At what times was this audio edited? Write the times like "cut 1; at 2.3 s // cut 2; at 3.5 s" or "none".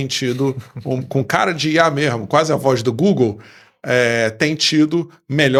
none